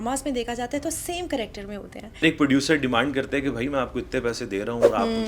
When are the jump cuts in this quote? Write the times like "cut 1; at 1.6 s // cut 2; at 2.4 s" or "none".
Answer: cut 1; at 2.2 s